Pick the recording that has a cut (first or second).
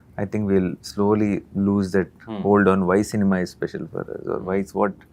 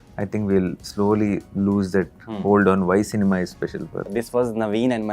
second